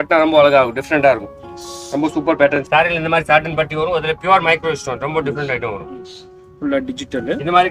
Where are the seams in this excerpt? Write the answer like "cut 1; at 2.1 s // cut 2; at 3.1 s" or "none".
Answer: cut 1; at 2.6 s